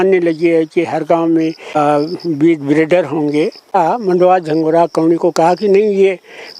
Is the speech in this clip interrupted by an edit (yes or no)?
yes